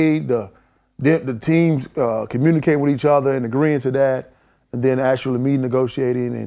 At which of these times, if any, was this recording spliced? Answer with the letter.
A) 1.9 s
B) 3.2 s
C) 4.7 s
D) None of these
D